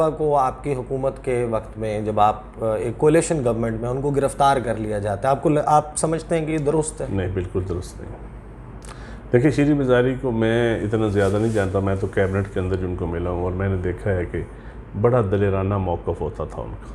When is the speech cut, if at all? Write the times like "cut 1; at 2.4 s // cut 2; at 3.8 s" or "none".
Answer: none